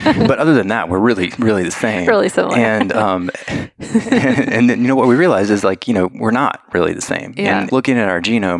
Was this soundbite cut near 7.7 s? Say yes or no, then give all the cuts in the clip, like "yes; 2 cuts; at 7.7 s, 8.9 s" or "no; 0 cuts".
yes; 1 cut; at 7.7 s